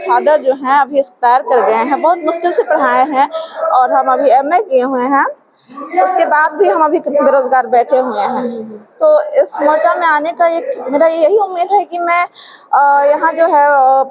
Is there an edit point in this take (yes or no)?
no